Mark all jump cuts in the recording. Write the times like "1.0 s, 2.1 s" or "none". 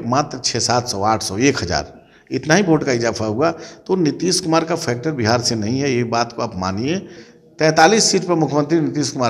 7.2 s